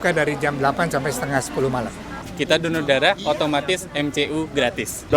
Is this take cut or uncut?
cut